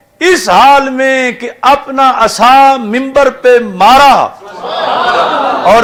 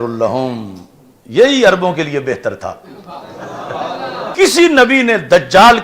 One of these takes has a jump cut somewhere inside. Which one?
second; 1 cut; at 4.3 s

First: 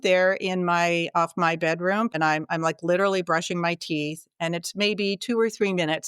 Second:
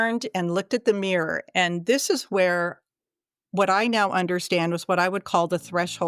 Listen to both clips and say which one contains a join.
first; 1 cut; at 2.1 s

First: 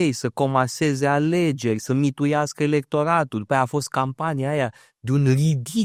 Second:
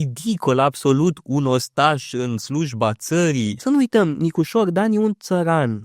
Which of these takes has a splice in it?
second; 1 cut; at 3.6 s

